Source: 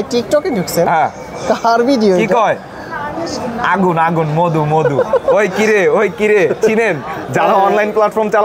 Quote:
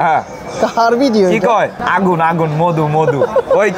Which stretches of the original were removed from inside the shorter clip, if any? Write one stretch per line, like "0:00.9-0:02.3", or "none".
0:02.7-0:03.6